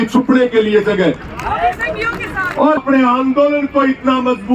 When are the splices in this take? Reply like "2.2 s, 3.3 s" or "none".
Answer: 2.8 s